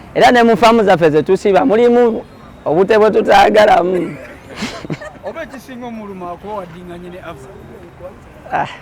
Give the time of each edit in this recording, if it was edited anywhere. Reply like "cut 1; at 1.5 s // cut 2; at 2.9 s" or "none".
none